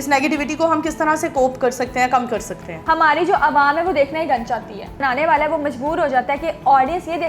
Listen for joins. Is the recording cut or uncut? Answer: cut